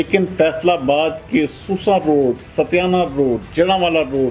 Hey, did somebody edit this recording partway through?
no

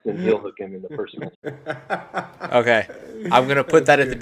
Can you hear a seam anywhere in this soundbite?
yes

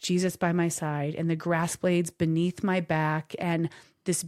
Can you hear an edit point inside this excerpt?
no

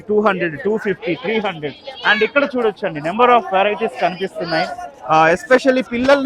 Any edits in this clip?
no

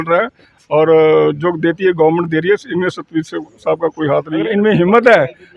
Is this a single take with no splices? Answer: no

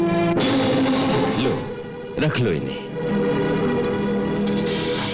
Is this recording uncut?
no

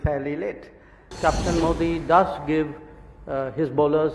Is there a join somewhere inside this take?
yes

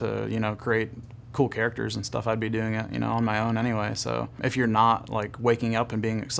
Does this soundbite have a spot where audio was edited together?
yes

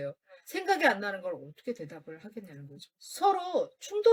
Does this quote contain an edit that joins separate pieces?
no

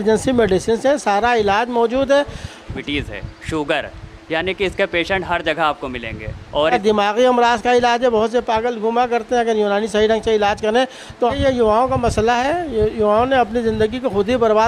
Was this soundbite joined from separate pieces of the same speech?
yes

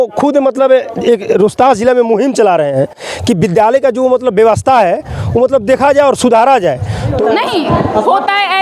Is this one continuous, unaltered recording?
no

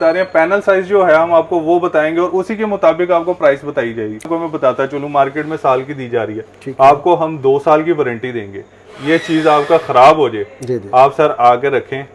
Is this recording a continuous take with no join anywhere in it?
no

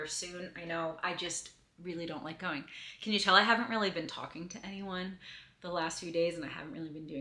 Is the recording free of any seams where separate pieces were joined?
no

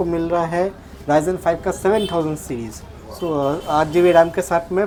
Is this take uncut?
yes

